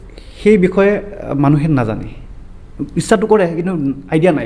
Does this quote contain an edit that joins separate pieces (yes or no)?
no